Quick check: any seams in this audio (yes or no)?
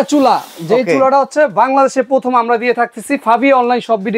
no